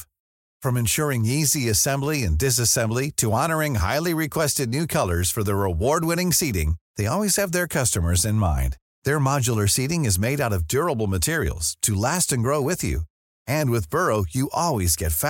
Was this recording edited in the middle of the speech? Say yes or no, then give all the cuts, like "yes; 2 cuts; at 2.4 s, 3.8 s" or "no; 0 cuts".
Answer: no; 0 cuts